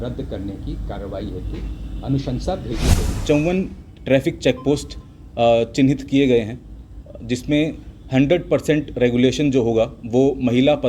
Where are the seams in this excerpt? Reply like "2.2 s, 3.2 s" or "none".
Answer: 3.1 s